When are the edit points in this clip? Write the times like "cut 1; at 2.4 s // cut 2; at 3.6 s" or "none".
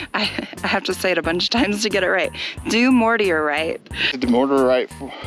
cut 1; at 4.1 s

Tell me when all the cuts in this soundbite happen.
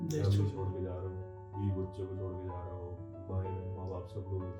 none

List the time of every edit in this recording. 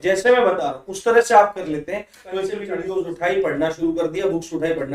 cut 1; at 2.7 s

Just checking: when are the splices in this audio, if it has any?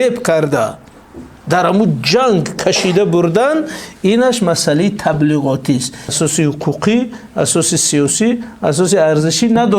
cut 1; at 6.1 s

